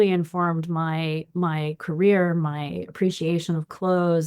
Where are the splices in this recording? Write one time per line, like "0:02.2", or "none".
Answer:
none